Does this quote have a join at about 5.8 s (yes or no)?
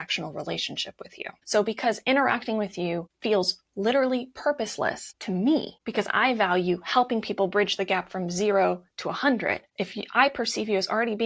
yes